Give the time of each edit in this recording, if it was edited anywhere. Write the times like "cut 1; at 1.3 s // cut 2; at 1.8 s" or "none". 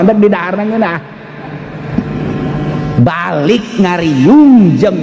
none